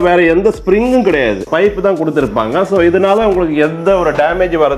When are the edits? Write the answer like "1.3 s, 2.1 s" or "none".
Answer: none